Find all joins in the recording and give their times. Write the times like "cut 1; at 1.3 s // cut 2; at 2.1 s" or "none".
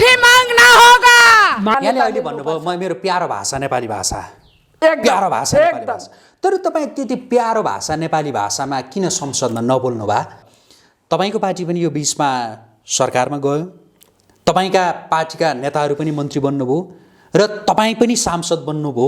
cut 1; at 1.7 s // cut 2; at 10.4 s